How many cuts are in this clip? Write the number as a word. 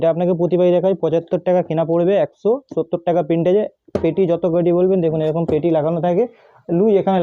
zero